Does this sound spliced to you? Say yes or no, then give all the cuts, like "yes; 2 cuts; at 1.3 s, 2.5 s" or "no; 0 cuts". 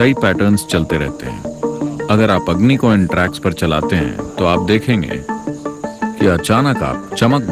no; 0 cuts